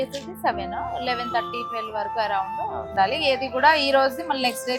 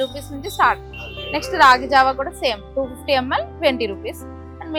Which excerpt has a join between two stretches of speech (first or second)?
first